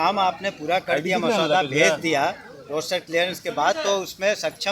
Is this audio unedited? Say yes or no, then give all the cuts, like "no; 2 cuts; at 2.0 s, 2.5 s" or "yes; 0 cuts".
yes; 0 cuts